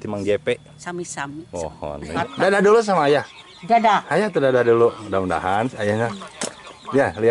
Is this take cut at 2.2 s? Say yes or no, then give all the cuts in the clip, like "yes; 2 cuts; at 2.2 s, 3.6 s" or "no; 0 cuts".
yes; 1 cut; at 2.2 s